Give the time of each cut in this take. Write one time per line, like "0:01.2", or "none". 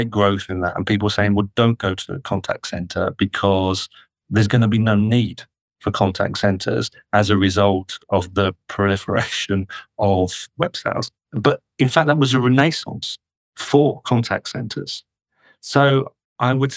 none

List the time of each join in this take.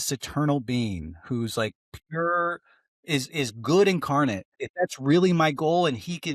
0:04.6

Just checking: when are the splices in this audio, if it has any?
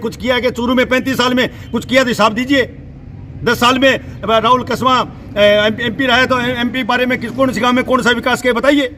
none

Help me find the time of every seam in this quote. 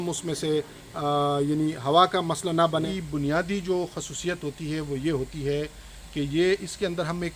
0:02.9

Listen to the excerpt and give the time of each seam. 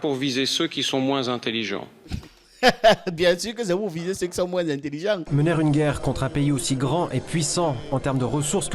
0:05.3

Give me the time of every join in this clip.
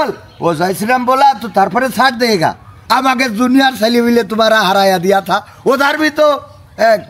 0:02.7

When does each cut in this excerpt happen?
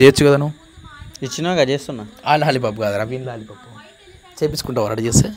none

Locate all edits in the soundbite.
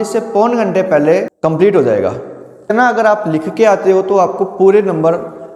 0:01.3
0:02.7

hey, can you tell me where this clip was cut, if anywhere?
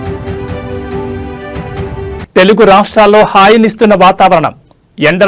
0:01.4

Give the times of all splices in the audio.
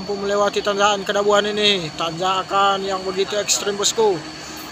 none

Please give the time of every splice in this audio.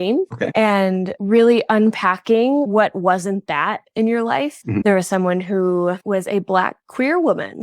0:04.8

